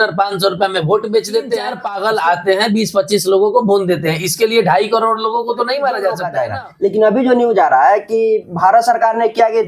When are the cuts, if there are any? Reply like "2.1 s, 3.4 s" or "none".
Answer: 1.8 s, 6.3 s